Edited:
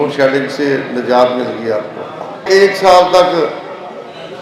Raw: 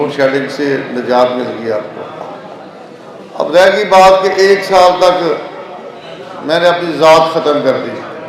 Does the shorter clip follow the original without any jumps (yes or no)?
no